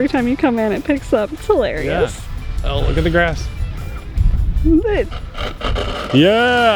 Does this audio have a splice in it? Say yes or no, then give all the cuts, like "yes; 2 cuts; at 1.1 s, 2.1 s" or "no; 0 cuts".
no; 0 cuts